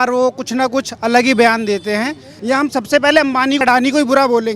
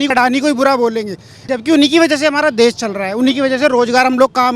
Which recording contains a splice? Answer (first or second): first